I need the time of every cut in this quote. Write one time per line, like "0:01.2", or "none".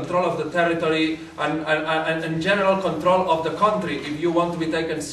none